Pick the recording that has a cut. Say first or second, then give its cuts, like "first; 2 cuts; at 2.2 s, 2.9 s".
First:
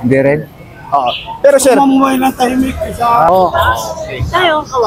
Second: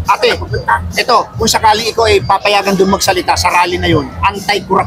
first; 1 cut; at 3.3 s